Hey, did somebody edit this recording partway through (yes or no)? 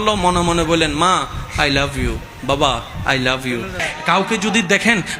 yes